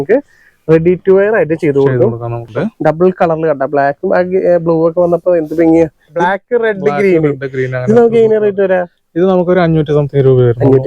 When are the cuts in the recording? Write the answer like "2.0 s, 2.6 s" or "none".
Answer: 2.5 s, 6.1 s